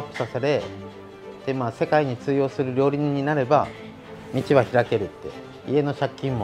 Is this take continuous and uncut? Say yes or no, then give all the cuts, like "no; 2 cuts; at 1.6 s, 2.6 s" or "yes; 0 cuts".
yes; 0 cuts